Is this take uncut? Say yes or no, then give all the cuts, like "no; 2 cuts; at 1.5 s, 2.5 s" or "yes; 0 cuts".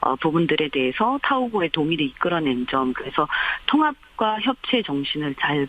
no; 1 cut; at 3.5 s